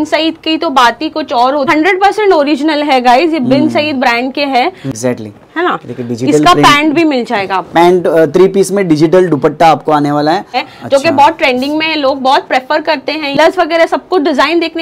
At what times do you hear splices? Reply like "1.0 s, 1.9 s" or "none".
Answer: 1.7 s, 4.9 s, 10.6 s, 13.4 s

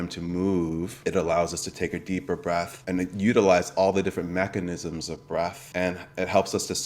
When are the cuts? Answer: 0.9 s, 2.8 s, 5.6 s

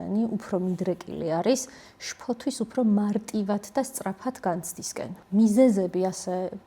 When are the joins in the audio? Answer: 5.1 s

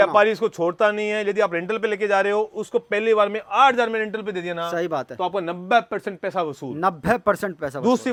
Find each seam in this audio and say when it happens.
none

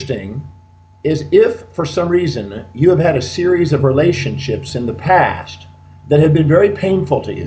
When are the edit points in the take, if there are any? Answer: 5.2 s

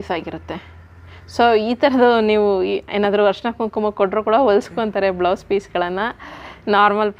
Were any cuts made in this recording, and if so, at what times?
none

